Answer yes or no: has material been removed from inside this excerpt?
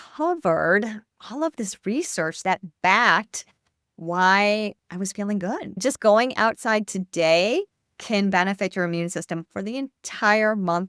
yes